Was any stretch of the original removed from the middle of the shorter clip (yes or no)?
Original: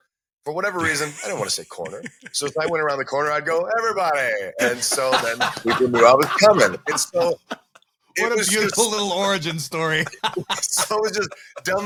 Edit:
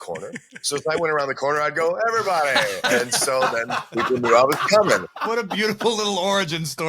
yes